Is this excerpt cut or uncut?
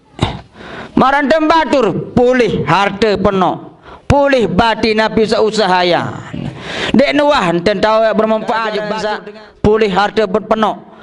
cut